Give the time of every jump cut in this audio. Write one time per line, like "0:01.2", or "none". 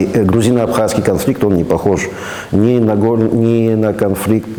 none